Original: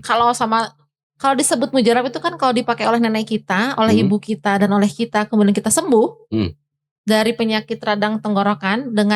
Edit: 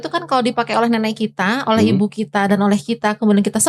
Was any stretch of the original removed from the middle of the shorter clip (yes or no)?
no